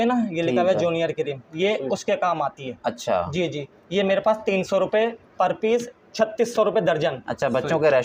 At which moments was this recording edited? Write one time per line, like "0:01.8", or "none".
none